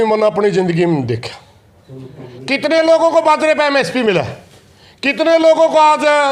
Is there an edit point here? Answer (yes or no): no